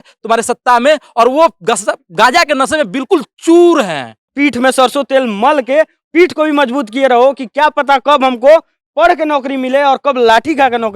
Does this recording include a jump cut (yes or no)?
yes